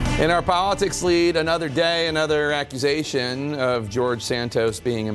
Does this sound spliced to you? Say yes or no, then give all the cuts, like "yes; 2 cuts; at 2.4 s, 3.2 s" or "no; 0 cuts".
no; 0 cuts